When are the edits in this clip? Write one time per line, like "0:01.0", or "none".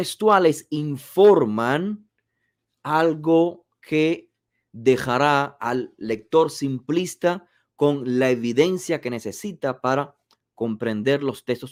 none